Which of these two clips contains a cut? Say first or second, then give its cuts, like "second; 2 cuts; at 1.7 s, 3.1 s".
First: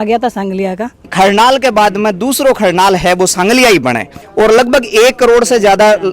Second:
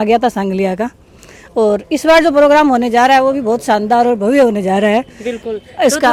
first; 2 cuts; at 1.0 s, 4.1 s